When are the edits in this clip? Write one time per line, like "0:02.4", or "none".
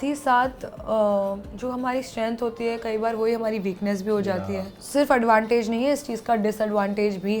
0:04.8